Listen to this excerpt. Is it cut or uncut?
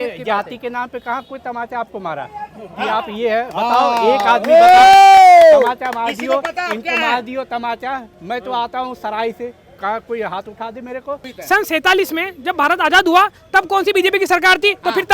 cut